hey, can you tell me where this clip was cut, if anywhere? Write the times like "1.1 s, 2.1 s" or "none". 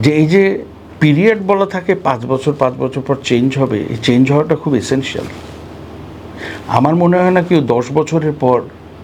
none